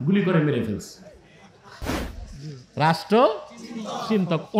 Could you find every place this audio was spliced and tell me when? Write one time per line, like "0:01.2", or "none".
0:02.1